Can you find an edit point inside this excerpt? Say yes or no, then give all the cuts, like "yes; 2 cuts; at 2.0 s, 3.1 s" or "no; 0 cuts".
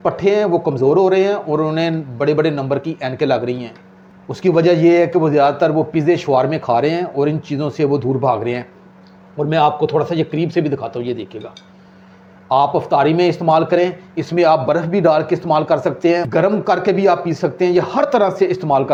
no; 0 cuts